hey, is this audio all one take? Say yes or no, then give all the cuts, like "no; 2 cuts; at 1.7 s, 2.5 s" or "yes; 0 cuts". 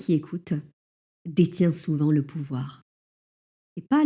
yes; 0 cuts